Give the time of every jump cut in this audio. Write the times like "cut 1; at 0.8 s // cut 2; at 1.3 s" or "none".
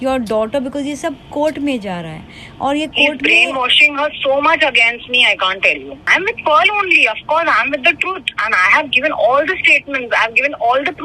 cut 1; at 6.0 s

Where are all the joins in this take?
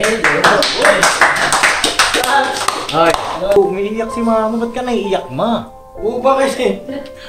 cut 1; at 3.6 s

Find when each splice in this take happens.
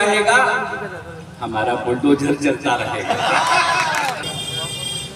cut 1; at 4.2 s

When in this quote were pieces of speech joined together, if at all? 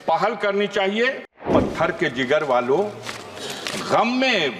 cut 1; at 1.5 s

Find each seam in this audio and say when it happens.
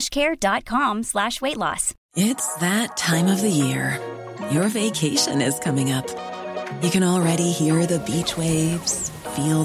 cut 1; at 1.9 s

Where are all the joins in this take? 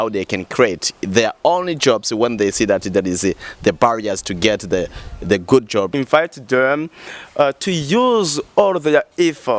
cut 1; at 5.9 s

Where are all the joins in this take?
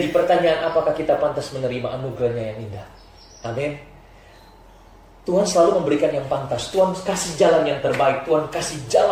none

